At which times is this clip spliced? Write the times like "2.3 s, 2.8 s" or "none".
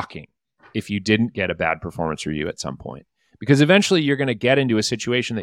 none